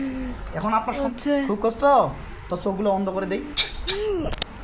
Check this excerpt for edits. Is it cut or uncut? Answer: cut